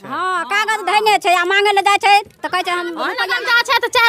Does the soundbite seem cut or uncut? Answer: cut